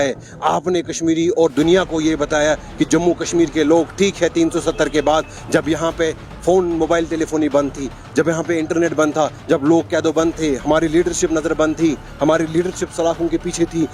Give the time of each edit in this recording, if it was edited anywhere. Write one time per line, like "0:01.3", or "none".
none